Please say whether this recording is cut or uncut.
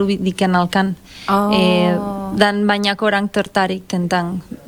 uncut